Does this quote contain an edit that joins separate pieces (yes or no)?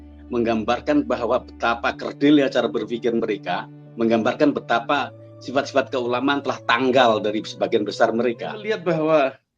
yes